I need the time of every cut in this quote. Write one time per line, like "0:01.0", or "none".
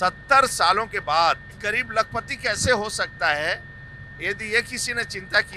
0:01.6